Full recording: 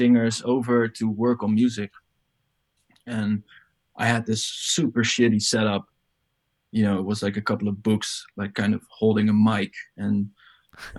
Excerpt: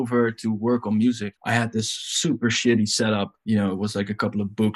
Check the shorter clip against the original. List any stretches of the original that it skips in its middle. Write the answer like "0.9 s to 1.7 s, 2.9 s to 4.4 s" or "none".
1.9 s to 3.9 s, 5.9 s to 6.6 s